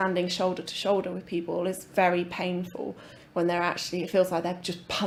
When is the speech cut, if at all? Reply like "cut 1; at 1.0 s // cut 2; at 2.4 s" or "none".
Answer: none